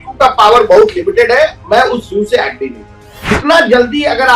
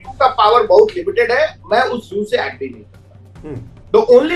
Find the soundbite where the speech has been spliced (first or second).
first